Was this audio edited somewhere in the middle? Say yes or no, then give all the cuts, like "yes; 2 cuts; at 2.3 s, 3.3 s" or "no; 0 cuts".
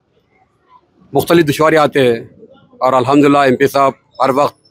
no; 0 cuts